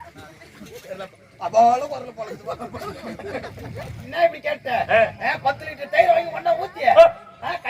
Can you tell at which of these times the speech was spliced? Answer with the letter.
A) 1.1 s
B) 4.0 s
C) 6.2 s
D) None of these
B